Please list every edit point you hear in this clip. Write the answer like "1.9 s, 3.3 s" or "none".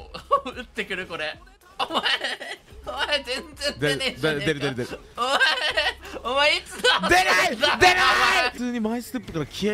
8.5 s

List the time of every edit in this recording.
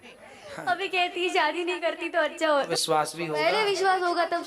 2.7 s

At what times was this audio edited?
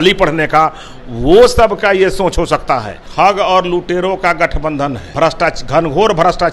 3.0 s, 5.0 s

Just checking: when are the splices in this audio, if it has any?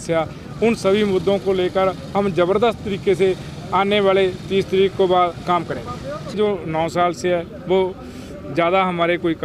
6.3 s

